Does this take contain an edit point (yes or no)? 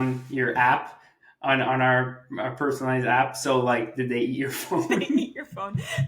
no